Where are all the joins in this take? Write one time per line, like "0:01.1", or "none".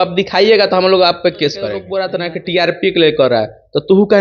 0:02.0